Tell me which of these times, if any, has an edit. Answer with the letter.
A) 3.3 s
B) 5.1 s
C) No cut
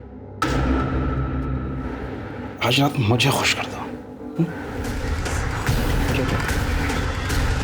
B